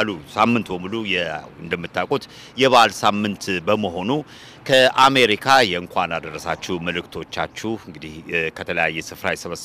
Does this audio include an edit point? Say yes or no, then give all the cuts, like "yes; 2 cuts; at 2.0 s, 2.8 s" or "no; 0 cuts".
no; 0 cuts